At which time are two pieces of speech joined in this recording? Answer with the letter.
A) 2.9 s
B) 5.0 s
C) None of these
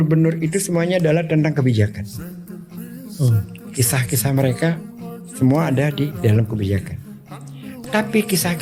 C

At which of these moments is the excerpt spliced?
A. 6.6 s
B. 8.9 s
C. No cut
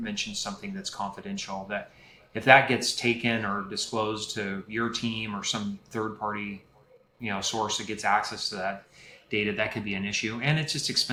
C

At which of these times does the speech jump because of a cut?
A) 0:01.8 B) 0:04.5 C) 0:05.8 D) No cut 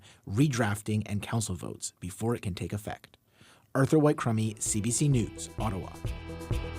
C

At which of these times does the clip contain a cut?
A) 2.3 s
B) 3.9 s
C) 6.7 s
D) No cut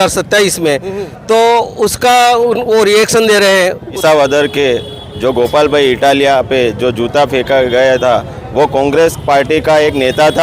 B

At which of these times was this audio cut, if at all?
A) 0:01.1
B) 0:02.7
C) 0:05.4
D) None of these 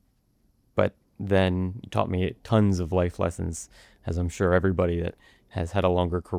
D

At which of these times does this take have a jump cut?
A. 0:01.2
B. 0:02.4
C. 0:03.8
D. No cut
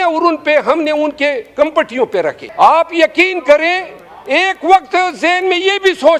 B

